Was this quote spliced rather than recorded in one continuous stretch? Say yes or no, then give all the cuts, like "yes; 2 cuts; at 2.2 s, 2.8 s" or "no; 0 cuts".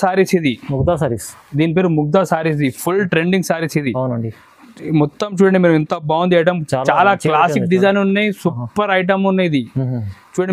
no; 0 cuts